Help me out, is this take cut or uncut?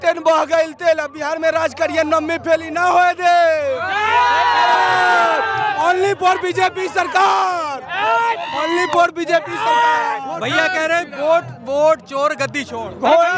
uncut